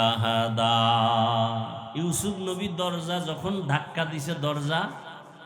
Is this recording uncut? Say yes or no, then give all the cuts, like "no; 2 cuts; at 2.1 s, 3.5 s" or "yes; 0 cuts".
no; 1 cut; at 1.8 s